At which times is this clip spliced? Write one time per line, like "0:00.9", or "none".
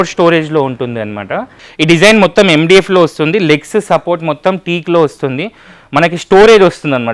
0:01.6